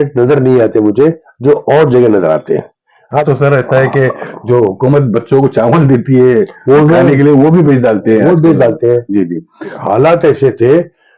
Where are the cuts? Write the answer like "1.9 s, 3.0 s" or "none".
3.2 s, 9.7 s